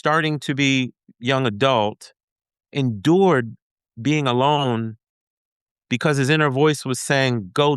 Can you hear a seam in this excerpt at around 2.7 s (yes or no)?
yes